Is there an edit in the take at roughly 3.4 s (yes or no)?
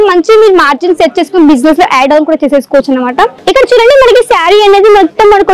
yes